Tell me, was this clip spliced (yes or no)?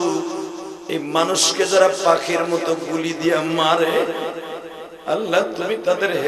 no